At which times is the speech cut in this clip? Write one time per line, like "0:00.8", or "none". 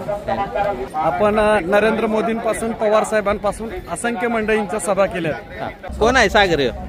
0:00.8
0:05.8

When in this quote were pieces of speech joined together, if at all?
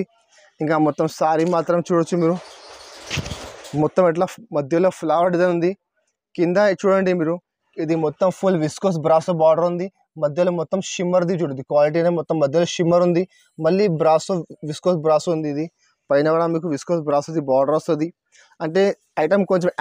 none

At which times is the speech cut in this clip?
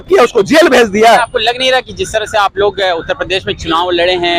0:01.3

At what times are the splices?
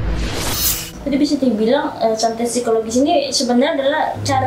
none

